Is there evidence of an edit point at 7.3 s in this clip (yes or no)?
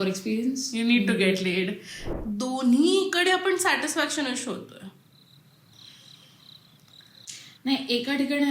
yes